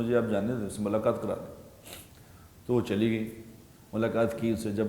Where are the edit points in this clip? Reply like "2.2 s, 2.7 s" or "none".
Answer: none